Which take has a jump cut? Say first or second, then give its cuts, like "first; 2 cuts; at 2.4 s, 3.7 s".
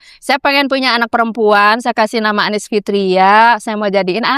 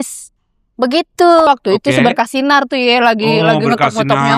second; 1 cut; at 1.5 s